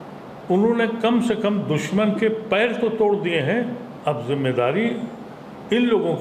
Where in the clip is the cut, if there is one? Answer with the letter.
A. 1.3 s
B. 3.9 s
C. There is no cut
B